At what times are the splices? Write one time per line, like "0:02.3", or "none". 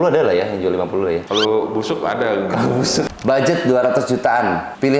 0:03.1